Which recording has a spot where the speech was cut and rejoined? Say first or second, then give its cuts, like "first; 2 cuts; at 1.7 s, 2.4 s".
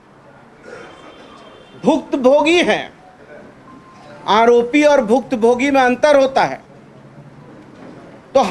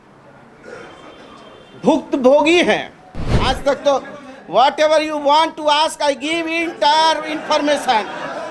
second; 1 cut; at 3.3 s